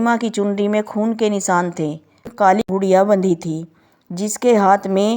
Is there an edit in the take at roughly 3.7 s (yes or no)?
no